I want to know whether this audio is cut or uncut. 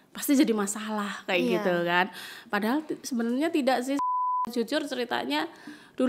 cut